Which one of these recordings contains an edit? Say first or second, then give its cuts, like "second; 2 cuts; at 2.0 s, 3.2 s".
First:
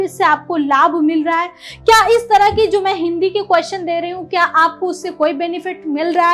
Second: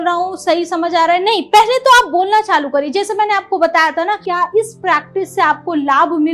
second; 1 cut; at 4.3 s